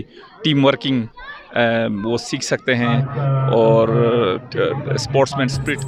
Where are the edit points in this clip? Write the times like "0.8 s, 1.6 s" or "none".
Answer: none